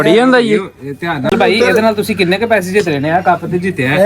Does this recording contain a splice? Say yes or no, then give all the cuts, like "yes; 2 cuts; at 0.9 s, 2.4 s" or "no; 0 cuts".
yes; 1 cut; at 1.3 s